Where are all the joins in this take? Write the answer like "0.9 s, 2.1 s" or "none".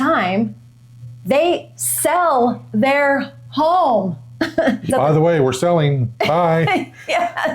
4.9 s

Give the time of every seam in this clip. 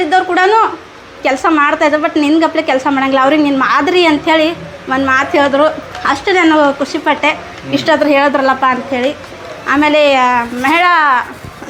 none

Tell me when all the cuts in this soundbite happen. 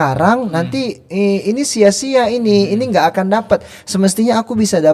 none

